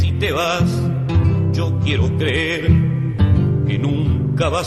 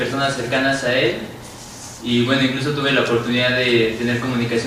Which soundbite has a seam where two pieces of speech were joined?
first; 1 cut; at 2.0 s

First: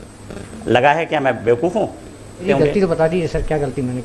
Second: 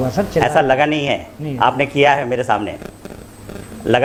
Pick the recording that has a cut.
first; 1 cut; at 2.4 s

